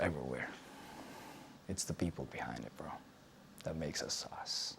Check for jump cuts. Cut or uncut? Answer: uncut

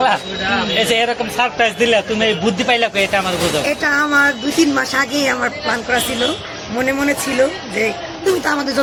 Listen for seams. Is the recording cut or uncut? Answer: uncut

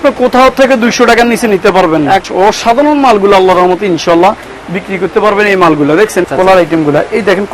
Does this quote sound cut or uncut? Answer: cut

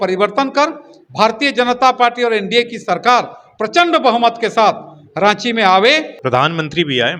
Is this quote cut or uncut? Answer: cut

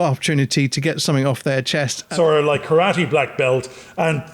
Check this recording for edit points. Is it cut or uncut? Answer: cut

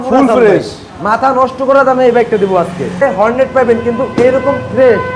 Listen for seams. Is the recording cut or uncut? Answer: cut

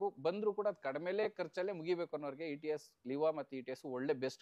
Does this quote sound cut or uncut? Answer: uncut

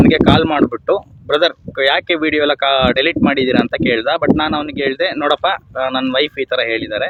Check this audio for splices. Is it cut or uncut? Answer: uncut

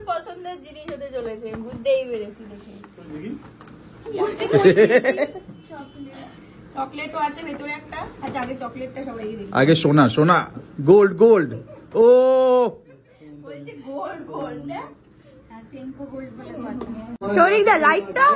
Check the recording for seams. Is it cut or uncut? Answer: cut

